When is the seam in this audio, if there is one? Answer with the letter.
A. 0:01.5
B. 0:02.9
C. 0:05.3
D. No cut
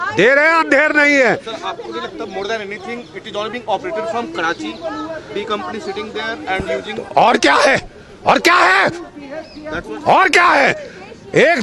D